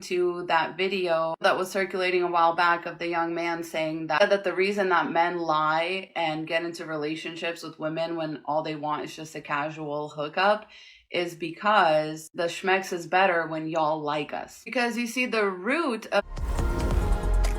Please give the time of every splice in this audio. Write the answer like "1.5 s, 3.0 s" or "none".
16.2 s